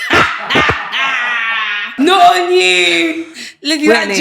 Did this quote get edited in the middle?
yes; 1 cut; at 1.8 s

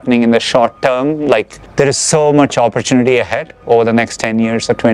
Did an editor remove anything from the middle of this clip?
no; 0 cuts

